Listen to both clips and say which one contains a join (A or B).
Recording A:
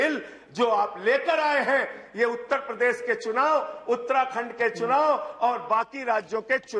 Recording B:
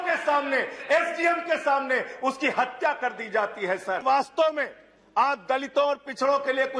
B